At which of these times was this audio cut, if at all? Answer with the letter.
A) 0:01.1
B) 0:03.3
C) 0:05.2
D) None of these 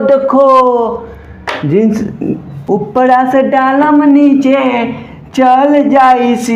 D